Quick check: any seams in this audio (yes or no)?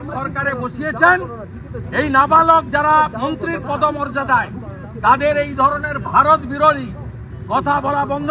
no